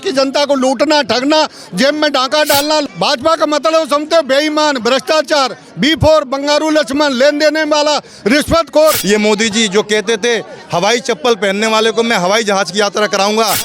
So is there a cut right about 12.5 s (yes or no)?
no